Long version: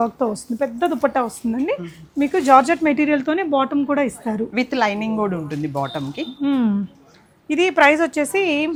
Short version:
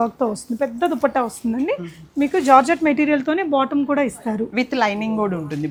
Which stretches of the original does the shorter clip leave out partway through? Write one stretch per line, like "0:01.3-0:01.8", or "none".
none